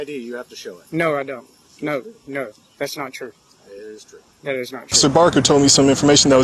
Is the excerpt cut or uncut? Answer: cut